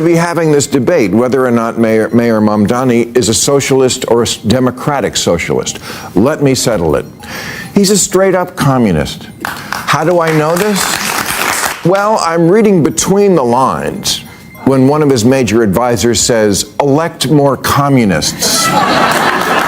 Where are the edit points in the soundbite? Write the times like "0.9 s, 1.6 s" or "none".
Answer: 11.7 s